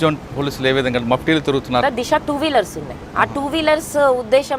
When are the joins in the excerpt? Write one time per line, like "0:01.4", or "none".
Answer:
0:01.8